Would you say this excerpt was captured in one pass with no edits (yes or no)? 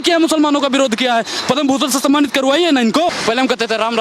no